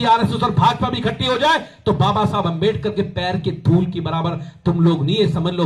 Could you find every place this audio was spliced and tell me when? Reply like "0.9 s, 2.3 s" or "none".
none